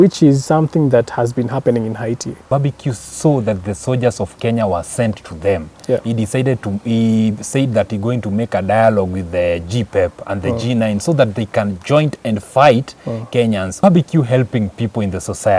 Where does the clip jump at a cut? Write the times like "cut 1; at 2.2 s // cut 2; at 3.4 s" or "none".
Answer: cut 1; at 2.5 s // cut 2; at 13.8 s